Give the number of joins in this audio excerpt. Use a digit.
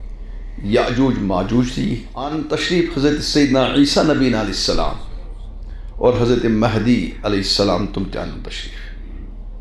1